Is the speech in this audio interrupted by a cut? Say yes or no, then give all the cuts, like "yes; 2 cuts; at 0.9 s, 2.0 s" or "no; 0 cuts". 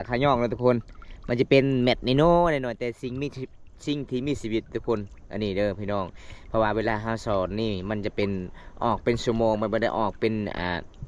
no; 0 cuts